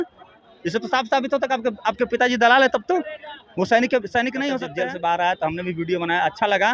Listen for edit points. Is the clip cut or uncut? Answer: cut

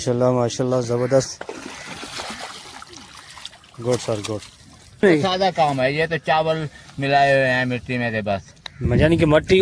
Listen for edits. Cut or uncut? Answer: cut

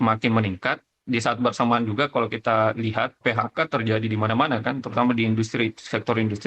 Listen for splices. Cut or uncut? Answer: cut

